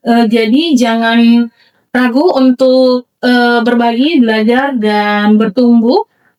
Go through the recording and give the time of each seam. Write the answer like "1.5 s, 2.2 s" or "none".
none